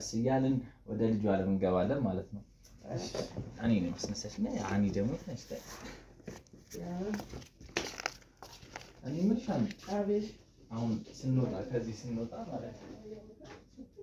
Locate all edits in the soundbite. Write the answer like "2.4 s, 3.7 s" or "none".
none

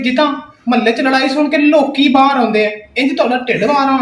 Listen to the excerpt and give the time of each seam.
none

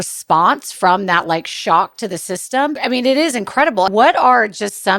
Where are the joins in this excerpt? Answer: 2.8 s, 3.9 s

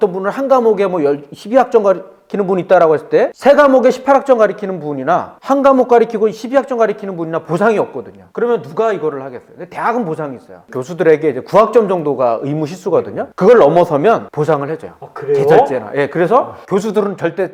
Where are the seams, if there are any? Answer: none

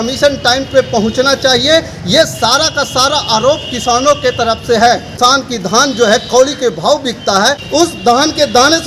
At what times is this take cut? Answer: 5.2 s, 7.6 s

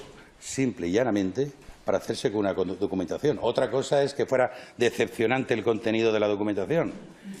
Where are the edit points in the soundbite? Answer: none

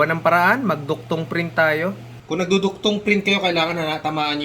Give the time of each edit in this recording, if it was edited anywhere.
2.2 s

